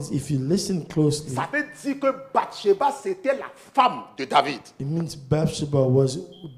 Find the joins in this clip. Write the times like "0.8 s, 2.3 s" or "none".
none